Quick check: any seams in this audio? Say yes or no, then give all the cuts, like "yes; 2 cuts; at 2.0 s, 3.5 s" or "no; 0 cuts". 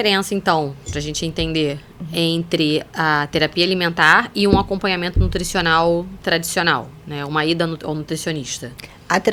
no; 0 cuts